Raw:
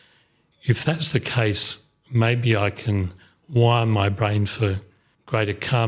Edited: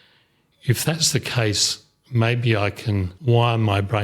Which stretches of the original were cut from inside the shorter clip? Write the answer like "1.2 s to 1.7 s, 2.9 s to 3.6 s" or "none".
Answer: 3.1 s to 3.4 s